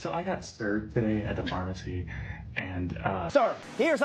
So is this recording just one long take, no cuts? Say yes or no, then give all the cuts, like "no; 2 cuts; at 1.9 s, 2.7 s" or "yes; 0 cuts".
yes; 0 cuts